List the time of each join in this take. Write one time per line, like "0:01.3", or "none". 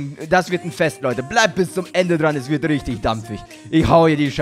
none